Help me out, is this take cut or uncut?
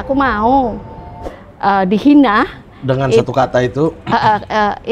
cut